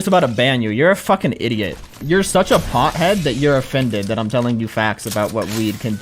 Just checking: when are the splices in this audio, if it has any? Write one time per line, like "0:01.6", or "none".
0:02.0

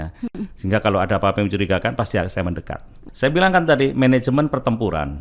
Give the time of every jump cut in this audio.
0:03.0

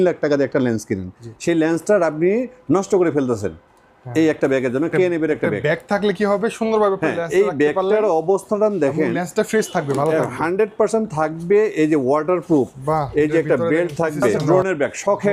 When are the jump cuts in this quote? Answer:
0:14.4

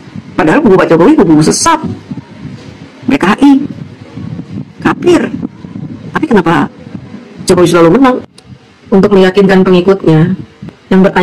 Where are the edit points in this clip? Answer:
none

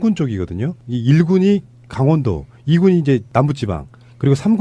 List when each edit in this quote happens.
none

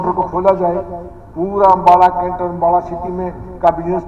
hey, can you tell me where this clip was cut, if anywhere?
none

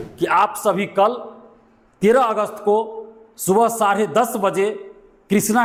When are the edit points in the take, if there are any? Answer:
none

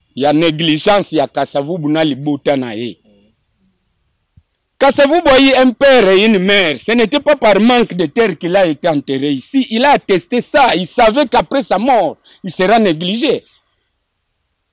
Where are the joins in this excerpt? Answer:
none

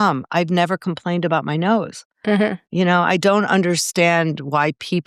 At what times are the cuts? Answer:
none

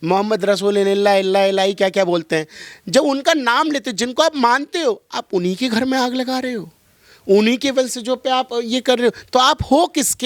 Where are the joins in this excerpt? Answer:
none

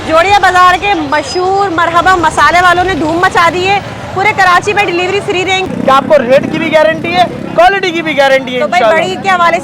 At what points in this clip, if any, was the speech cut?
0:05.7

